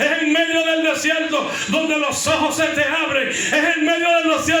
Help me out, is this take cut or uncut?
uncut